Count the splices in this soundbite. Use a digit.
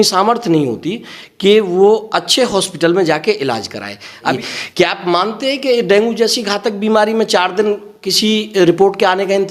1